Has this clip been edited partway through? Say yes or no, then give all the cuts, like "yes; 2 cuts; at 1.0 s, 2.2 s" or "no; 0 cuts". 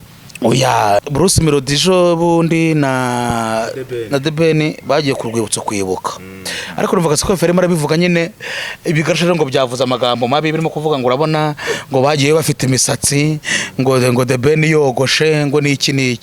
yes; 1 cut; at 1.0 s